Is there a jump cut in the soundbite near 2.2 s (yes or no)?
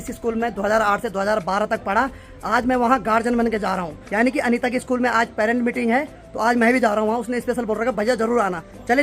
no